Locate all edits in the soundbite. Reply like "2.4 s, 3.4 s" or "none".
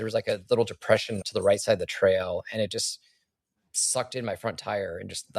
1.2 s